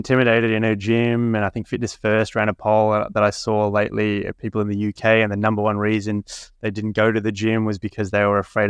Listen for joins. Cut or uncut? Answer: uncut